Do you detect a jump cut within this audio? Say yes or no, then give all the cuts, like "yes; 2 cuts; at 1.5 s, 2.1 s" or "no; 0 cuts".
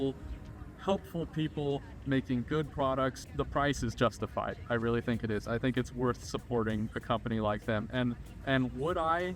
no; 0 cuts